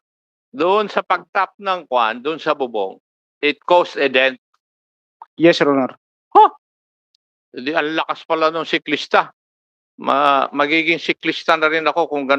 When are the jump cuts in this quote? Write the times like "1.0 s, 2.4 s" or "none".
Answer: none